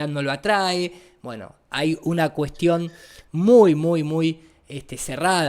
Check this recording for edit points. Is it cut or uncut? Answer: uncut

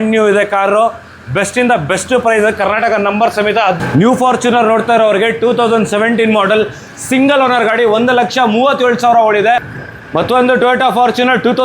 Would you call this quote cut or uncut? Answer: cut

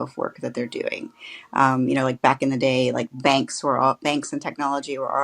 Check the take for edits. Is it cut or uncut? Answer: uncut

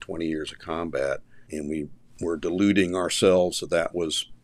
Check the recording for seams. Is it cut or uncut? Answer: cut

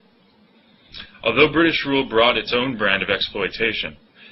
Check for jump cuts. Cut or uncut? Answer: cut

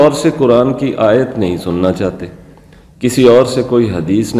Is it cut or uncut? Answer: uncut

